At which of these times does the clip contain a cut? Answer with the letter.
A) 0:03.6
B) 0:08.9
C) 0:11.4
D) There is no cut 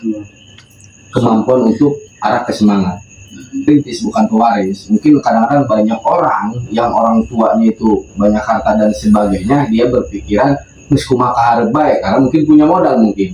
A